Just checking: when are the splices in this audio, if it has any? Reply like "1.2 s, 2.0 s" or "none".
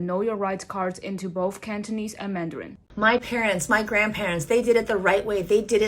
2.9 s